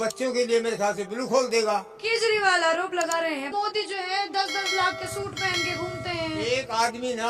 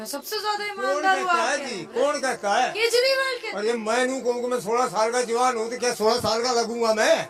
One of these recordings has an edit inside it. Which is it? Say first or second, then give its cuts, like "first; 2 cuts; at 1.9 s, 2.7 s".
first; 2 cuts; at 1.9 s, 3.5 s